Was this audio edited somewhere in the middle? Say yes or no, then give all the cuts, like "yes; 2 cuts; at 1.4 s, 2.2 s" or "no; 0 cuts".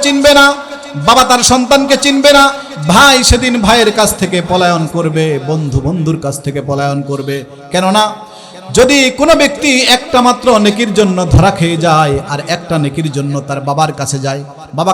no; 0 cuts